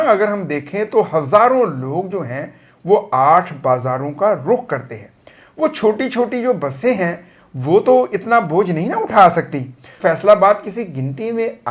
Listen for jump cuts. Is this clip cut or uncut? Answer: cut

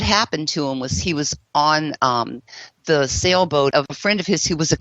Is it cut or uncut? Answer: cut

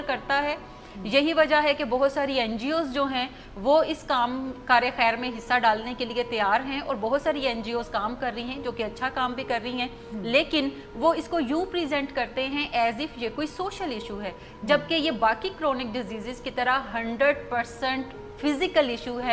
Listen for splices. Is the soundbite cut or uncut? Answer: uncut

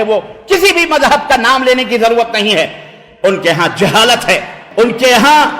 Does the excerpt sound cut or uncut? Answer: cut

